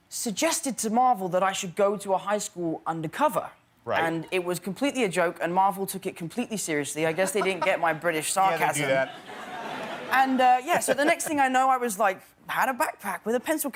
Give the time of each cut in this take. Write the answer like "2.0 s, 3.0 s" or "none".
none